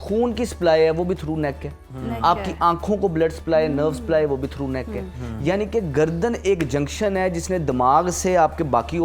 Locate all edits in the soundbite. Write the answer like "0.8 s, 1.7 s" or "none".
none